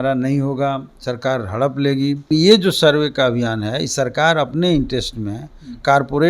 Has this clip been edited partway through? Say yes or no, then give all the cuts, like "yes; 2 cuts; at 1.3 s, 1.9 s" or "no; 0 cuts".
yes; 1 cut; at 2.3 s